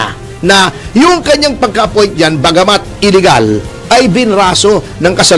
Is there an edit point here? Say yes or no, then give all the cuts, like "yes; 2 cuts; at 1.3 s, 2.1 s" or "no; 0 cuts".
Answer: no; 0 cuts